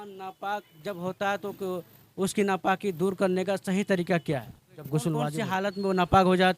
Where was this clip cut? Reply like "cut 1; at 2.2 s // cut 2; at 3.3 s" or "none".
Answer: cut 1; at 5.4 s